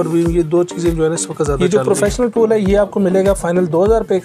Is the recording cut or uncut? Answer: cut